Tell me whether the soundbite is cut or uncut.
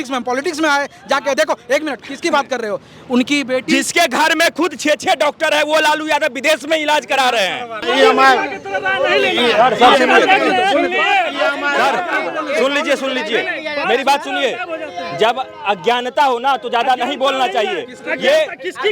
cut